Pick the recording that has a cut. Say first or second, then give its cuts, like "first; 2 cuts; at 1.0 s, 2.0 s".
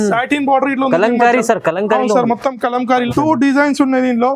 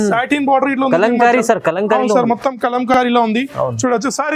first; 1 cut; at 2.9 s